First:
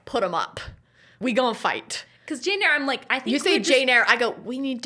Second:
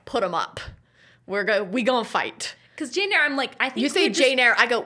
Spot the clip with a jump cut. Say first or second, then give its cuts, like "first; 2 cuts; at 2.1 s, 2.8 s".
first; 1 cut; at 1.2 s